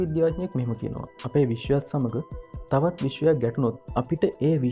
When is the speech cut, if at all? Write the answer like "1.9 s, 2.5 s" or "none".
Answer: none